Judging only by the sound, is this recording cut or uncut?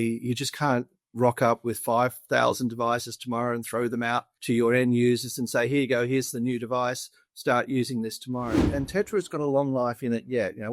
cut